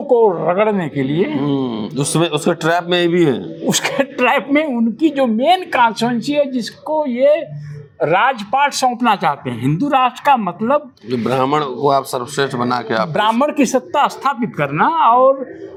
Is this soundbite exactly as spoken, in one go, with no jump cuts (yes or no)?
yes